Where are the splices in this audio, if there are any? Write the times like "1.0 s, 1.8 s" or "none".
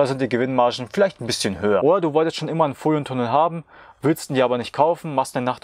1.8 s